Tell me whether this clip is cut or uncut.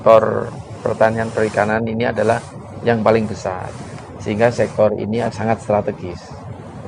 cut